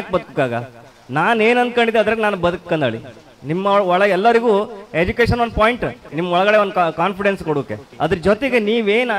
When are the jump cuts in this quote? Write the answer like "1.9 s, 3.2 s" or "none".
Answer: 6.1 s, 7.8 s